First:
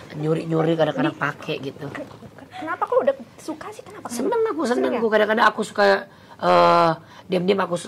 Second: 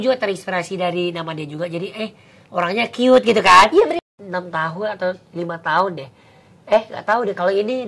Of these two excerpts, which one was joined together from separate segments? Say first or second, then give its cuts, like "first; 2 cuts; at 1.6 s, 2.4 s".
second; 1 cut; at 4.0 s